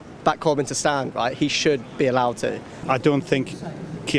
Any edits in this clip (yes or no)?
yes